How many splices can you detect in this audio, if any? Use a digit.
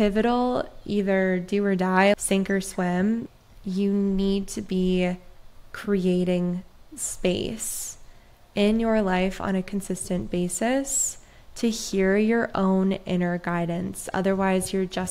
2